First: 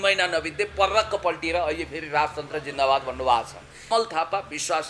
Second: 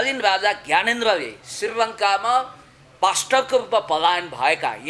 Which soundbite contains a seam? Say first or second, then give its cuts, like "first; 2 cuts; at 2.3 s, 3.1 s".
first; 1 cut; at 3.9 s